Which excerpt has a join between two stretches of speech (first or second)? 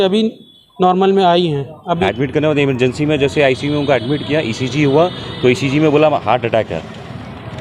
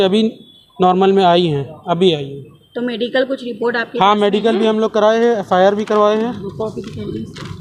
first